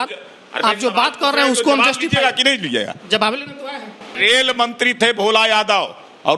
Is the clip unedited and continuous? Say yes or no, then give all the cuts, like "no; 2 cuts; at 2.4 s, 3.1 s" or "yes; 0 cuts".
no; 1 cut; at 4.1 s